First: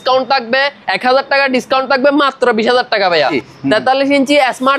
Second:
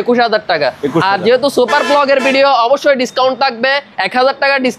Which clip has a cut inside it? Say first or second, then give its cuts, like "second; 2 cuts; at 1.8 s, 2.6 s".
first; 1 cut; at 3.4 s